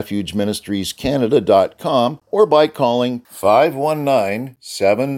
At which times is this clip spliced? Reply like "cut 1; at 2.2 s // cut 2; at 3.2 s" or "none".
cut 1; at 2.2 s